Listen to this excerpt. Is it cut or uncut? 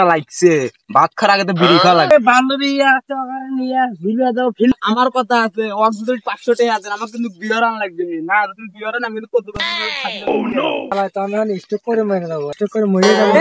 cut